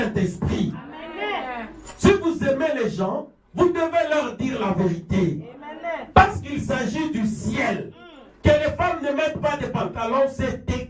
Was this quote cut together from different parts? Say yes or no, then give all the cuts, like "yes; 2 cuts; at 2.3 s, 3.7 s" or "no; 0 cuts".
no; 0 cuts